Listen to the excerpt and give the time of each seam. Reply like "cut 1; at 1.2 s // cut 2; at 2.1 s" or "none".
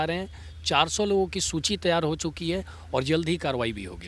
none